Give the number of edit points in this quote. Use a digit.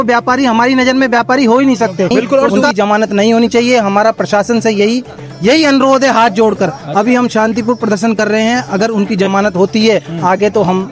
1